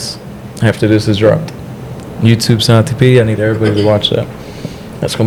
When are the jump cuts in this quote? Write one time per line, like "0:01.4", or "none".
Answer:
none